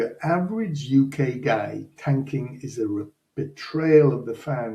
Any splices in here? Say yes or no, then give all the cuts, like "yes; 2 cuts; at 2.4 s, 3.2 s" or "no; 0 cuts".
no; 0 cuts